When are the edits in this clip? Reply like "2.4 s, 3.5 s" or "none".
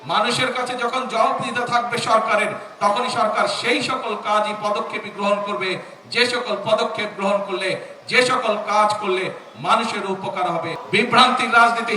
10.8 s